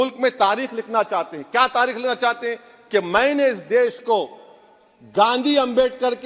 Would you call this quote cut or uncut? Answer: uncut